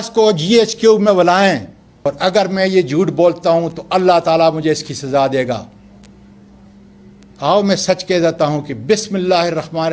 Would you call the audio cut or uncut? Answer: cut